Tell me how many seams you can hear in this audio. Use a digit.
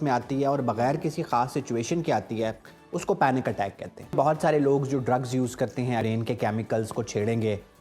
2